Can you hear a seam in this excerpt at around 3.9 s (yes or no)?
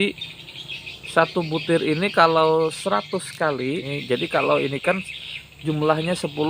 yes